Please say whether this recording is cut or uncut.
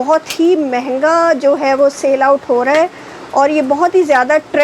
uncut